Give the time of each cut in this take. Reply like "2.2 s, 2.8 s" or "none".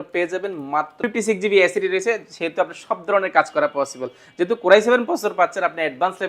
1.0 s